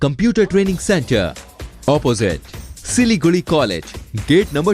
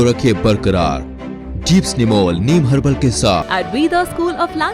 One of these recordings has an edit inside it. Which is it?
second; 1 cut; at 3.5 s

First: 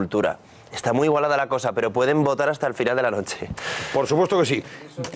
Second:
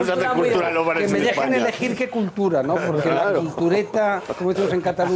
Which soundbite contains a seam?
first; 1 cut; at 3.1 s

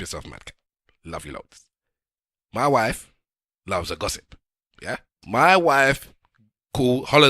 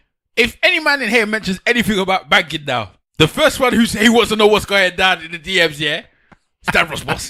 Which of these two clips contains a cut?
first; 1 cut; at 5.1 s

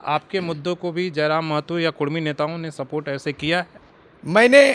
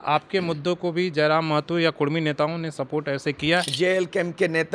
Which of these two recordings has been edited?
second; 1 cut; at 3.7 s

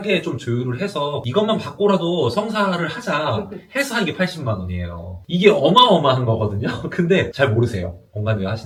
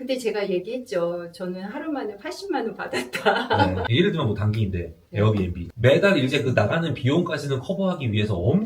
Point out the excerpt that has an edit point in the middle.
second; 2 cuts; at 3.8 s, 5.6 s

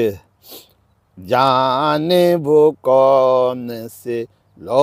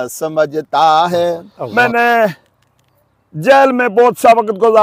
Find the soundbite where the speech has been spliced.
second; 1 cut; at 1.4 s

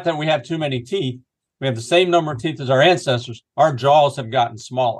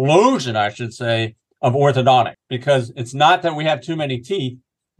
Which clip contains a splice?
second; 1 cut; at 2.5 s

